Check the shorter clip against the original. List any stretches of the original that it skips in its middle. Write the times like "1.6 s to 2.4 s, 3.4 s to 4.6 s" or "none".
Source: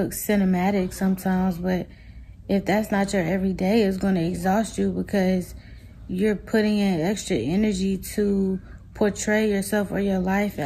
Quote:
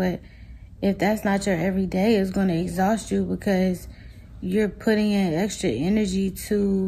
none